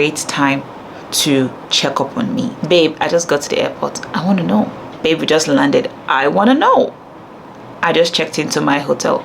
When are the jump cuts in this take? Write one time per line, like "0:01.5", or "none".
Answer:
0:02.6
0:04.8